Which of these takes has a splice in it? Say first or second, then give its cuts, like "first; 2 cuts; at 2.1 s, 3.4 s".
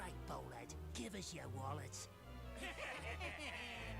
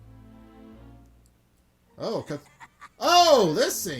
second; 1 cut; at 1.9 s